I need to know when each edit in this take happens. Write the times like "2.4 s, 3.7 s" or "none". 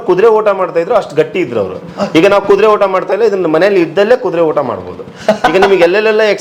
none